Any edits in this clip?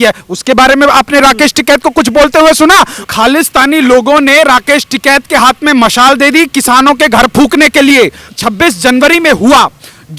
yes; 2 cuts; at 3.0 s, 8.3 s

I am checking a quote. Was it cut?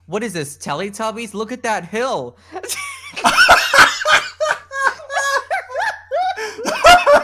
no; 0 cuts

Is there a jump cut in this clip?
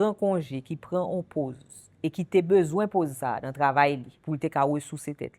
yes; 1 cut; at 4.1 s

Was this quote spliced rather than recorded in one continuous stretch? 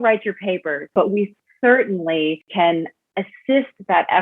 yes; 2 cuts; at 0.9 s, 2.5 s

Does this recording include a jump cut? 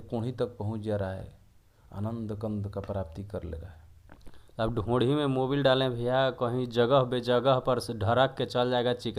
no; 0 cuts

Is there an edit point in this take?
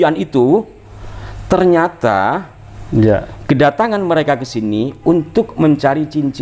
no; 0 cuts

